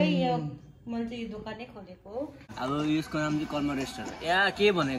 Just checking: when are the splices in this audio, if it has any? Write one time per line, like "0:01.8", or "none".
0:02.5